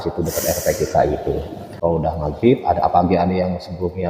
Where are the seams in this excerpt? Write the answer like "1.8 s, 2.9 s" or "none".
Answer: 1.8 s